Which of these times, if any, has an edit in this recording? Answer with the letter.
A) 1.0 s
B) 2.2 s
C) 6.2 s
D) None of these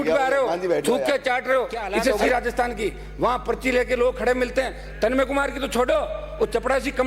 B